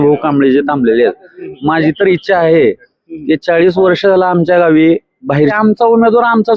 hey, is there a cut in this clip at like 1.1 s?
no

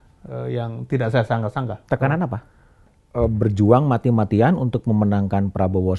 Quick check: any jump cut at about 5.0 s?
no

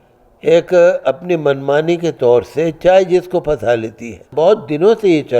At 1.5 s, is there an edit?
no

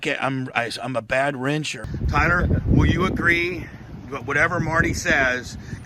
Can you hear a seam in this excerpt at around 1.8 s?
yes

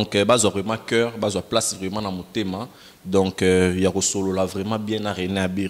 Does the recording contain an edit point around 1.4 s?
no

